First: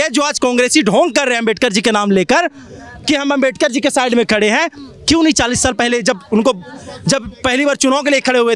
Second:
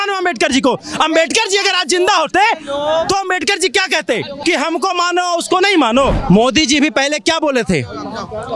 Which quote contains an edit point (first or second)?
second